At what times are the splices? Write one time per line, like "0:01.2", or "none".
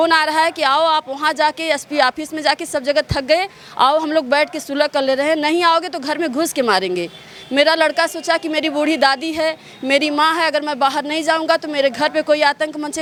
none